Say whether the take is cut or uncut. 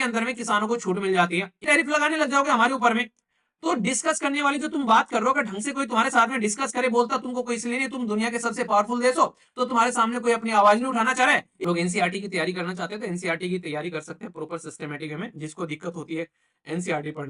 cut